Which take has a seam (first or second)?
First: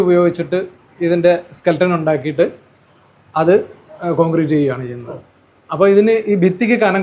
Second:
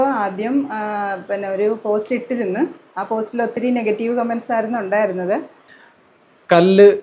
second